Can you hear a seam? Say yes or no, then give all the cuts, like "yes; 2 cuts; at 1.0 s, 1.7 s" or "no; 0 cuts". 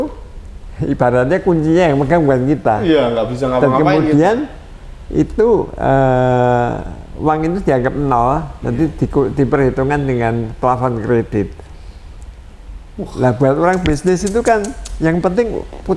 no; 0 cuts